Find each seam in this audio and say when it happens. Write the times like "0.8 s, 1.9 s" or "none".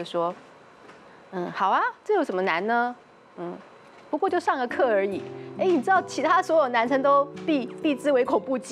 none